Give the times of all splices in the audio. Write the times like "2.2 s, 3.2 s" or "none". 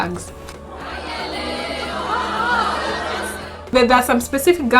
3.7 s

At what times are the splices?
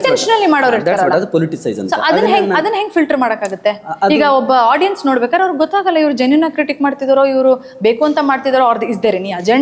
none

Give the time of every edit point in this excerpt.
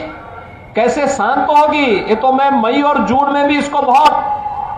none

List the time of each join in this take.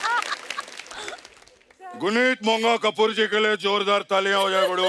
none

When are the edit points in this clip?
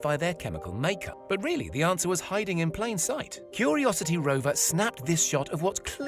1.1 s

